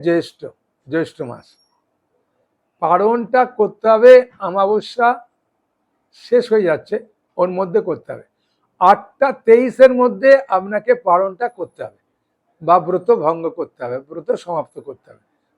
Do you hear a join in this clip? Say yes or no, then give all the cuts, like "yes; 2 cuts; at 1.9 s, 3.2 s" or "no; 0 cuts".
no; 0 cuts